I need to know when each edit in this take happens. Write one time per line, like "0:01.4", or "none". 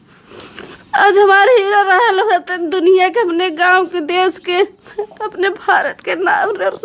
none